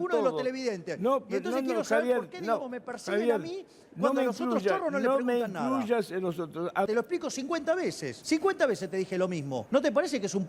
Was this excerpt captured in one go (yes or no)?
no